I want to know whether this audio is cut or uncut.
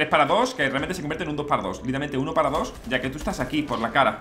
cut